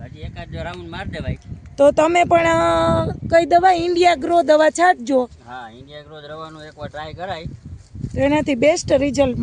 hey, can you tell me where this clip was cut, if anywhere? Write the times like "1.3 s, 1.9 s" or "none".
none